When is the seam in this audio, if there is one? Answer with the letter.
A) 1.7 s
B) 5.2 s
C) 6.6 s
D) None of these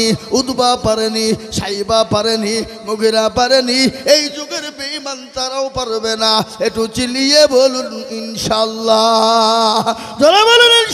D